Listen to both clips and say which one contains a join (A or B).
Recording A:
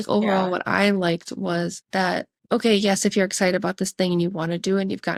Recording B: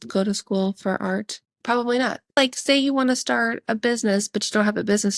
B